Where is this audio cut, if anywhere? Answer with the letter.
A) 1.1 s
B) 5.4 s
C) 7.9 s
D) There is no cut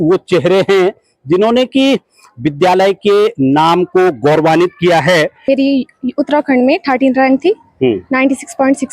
B